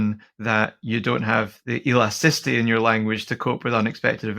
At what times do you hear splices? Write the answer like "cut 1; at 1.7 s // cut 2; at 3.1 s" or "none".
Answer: cut 1; at 1.6 s